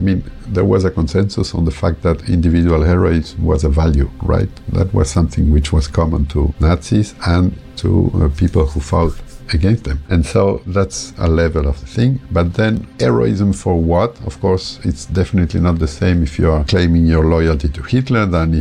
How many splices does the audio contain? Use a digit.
0